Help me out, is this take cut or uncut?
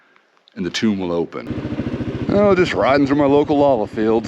cut